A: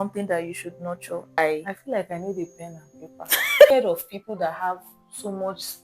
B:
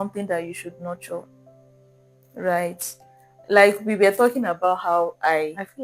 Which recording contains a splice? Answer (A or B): A